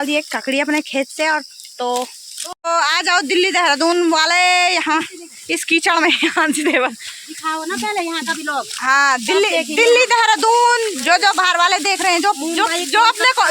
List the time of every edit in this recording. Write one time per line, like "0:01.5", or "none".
0:02.6